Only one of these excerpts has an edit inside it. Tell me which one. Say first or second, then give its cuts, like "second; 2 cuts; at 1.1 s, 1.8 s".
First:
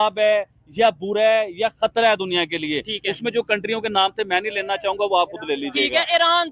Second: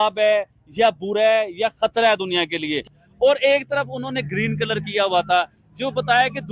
second; 1 cut; at 3.0 s